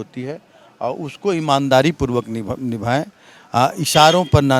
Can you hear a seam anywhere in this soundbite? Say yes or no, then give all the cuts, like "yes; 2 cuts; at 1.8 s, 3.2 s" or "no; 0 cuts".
no; 0 cuts